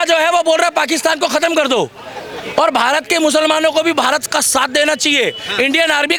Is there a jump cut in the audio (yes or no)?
no